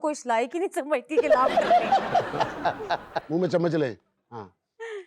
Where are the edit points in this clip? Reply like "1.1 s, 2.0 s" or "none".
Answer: 3.1 s